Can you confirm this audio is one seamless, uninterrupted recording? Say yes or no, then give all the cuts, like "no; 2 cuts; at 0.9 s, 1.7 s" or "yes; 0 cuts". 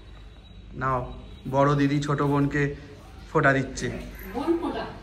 yes; 0 cuts